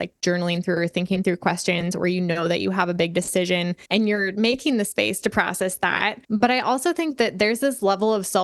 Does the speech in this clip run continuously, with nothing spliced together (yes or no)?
no